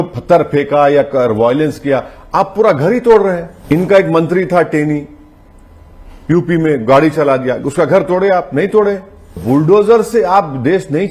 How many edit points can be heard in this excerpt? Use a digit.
2